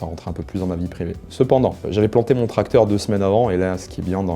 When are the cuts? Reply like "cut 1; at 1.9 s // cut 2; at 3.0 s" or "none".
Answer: cut 1; at 1.8 s

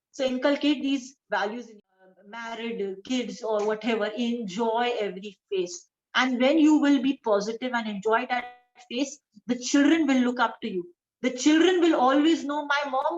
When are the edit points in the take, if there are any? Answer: cut 1; at 1.8 s

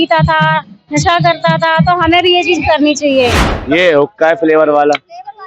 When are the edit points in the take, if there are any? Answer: cut 1; at 3.5 s

